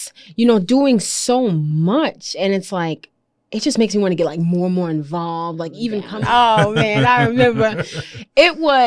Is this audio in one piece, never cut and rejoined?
no; 1 cut; at 6.1 s

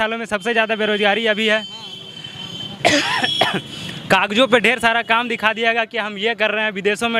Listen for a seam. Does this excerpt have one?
no; 0 cuts

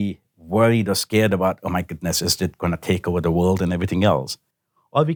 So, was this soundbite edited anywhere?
no; 0 cuts

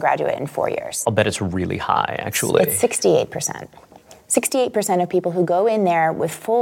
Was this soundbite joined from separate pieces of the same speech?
yes; 1 cut; at 0.9 s

